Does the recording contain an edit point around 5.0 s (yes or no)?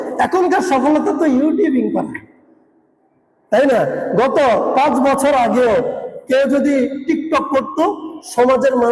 no